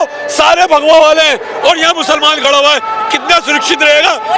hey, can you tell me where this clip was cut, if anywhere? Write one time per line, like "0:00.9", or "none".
none